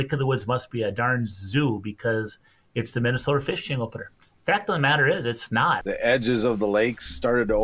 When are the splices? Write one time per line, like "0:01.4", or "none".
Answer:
0:05.8